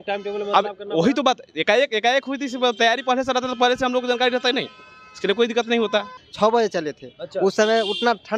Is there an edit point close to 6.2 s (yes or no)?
yes